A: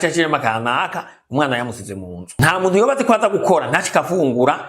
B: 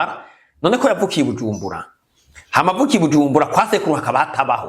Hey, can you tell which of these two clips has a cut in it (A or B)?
A